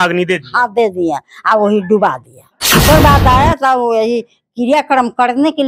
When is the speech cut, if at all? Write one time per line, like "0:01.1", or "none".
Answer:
0:02.8